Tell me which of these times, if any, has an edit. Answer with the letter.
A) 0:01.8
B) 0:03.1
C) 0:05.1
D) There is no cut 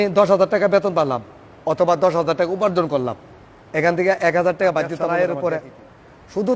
C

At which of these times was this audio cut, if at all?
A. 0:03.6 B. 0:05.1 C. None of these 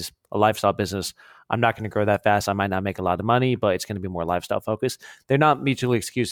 C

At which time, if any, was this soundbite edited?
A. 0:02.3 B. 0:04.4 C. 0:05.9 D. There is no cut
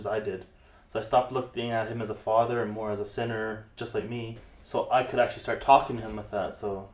B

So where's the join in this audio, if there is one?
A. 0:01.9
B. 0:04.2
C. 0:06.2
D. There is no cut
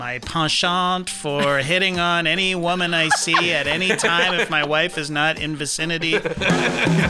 D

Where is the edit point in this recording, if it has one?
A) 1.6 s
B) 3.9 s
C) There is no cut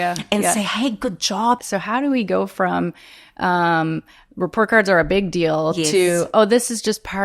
A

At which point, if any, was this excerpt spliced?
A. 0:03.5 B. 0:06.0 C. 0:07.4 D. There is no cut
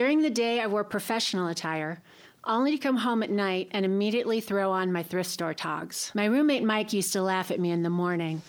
B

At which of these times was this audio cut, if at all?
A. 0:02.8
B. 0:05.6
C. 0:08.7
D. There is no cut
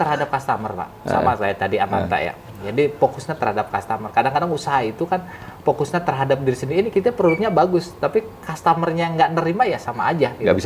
D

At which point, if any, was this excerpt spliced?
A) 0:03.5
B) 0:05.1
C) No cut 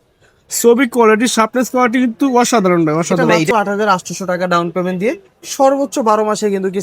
A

